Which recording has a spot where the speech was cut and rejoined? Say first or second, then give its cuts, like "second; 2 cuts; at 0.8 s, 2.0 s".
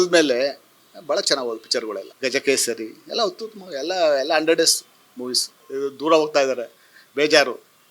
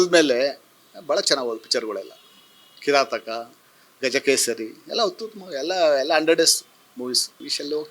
first; 2 cuts; at 2.1 s, 5.6 s